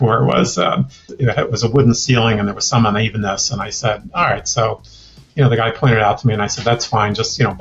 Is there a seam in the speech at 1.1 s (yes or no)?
yes